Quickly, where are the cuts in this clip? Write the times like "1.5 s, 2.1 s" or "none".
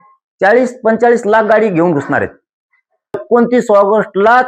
3.2 s